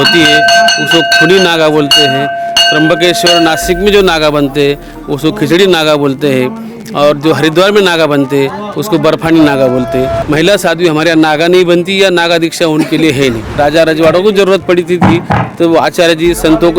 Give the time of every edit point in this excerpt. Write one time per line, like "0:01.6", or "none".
0:10.2
0:13.5